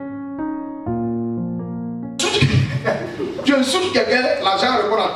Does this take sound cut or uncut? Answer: uncut